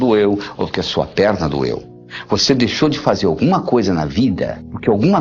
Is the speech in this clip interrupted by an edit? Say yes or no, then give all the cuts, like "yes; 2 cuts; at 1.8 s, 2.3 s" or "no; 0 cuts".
no; 0 cuts